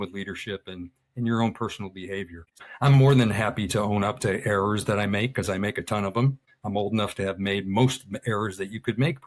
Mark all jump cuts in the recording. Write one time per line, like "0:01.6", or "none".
0:02.7
0:06.5